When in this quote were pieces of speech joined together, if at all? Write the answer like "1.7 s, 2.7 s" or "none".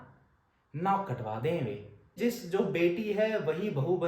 2.2 s